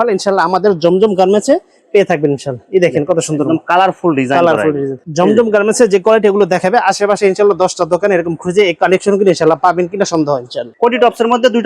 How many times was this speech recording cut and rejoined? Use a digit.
2